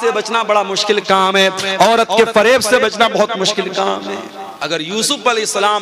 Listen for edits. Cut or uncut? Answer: cut